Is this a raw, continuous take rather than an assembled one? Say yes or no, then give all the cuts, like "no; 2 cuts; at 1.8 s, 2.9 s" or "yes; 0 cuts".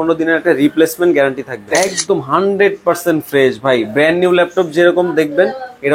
no; 1 cut; at 2.0 s